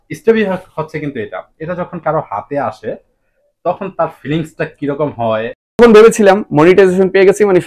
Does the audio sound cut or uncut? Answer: cut